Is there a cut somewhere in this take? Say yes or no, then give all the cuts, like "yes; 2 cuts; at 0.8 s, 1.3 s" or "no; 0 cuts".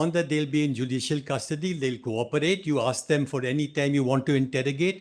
no; 0 cuts